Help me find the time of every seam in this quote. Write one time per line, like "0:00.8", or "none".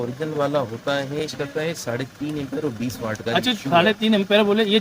0:01.2